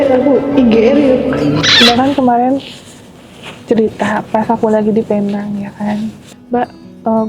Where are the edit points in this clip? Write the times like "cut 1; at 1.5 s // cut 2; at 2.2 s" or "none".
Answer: cut 1; at 1.7 s // cut 2; at 6.3 s